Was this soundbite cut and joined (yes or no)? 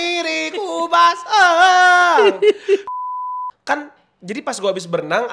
yes